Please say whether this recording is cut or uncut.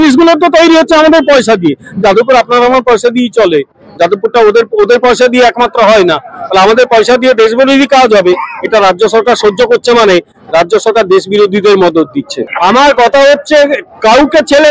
uncut